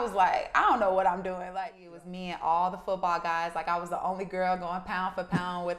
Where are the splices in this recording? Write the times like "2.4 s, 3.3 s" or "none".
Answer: 1.5 s